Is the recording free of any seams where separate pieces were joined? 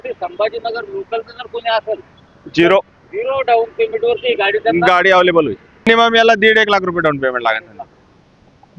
no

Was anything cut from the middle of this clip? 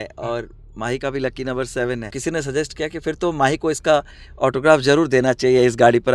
yes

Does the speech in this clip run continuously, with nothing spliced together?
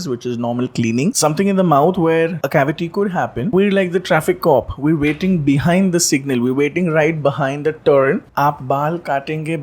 no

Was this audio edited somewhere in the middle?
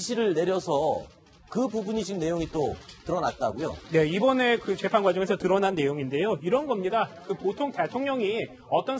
yes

